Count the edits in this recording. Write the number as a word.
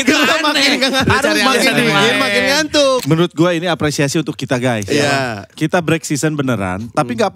one